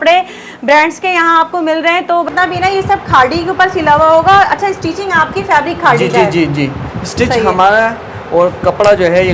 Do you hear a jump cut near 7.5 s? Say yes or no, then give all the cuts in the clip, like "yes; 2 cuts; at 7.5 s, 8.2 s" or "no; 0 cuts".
no; 1 cut; at 2.3 s